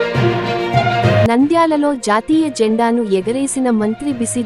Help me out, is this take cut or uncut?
uncut